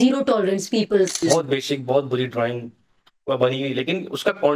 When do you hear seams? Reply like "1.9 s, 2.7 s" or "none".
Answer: 1.2 s